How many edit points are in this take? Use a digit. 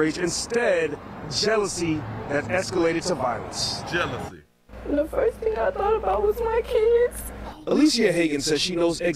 1